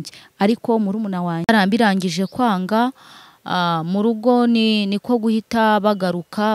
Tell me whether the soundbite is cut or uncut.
cut